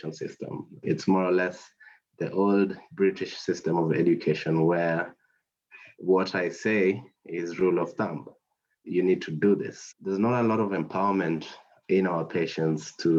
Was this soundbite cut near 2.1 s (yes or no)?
no